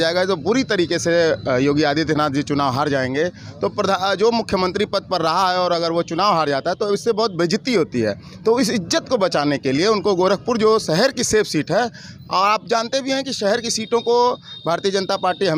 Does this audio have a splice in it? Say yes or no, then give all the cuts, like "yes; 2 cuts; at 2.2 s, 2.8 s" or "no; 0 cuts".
no; 0 cuts